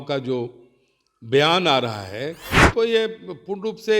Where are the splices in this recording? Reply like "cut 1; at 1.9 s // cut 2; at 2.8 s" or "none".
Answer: cut 1; at 2.5 s